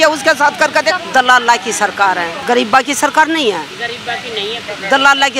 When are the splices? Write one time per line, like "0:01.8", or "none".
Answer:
0:01.0
0:02.3